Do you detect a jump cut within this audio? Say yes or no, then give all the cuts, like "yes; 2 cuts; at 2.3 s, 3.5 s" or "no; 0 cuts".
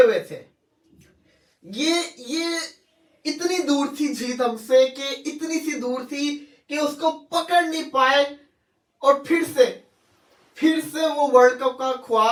no; 0 cuts